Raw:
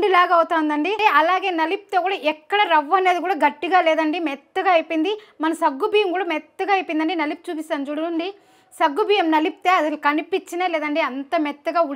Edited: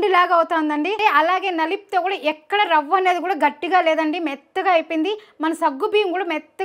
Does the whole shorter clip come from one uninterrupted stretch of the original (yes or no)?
yes